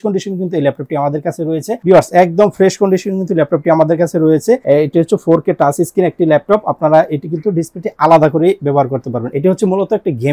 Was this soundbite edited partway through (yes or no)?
yes